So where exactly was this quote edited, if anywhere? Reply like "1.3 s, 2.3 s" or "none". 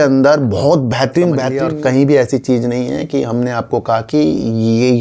1.5 s